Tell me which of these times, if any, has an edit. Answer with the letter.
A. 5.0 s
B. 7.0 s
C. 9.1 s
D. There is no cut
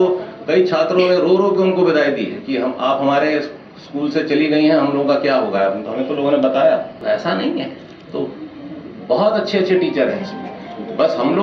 B